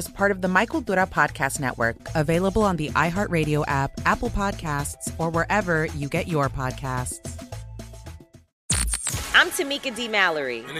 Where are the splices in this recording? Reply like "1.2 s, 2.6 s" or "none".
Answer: 8.4 s